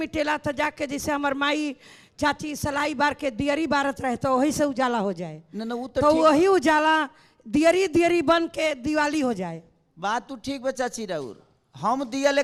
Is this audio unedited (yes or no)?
yes